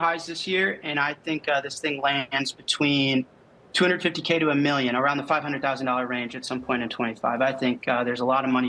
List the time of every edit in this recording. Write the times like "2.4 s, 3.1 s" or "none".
none